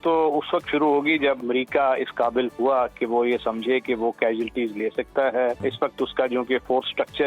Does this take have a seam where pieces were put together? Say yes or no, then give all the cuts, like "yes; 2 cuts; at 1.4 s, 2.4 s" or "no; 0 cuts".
yes; 2 cuts; at 1.4 s, 5.6 s